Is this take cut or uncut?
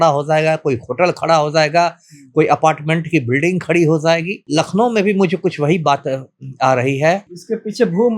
cut